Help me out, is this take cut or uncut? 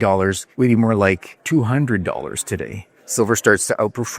cut